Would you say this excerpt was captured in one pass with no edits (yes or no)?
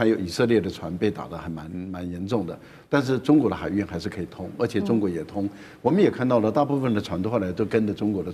yes